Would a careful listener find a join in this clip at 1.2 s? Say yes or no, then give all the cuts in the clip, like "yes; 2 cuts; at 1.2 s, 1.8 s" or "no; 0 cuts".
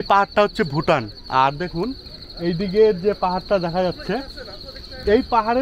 yes; 1 cut; at 1.2 s